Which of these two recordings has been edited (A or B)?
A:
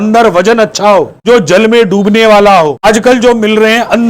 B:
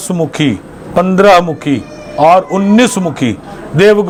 A